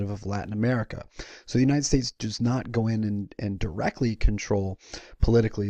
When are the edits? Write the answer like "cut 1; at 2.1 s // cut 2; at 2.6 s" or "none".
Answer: none